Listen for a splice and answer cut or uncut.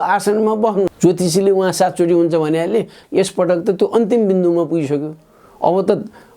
cut